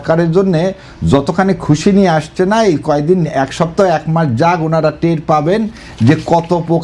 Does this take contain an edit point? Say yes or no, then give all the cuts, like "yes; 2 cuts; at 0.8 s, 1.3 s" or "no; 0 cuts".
no; 0 cuts